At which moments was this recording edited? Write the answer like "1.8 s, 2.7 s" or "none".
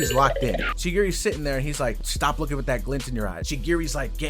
3.4 s